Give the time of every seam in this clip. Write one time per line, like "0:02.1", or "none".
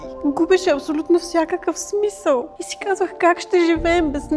0:02.6